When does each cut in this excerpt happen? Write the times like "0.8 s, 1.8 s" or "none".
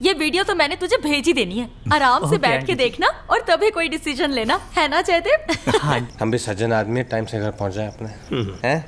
6.1 s